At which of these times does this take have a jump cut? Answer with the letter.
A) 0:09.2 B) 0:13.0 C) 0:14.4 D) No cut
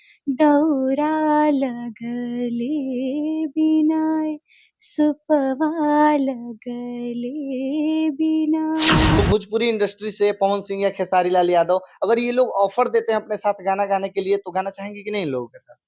A